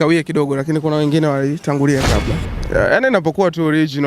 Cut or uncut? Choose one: cut